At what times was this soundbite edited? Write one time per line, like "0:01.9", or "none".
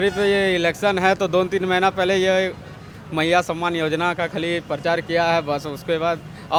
none